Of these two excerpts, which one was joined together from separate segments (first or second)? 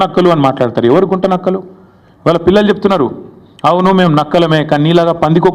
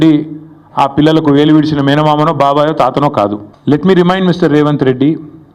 second